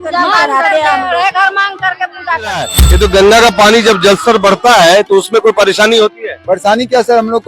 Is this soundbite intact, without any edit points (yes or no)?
no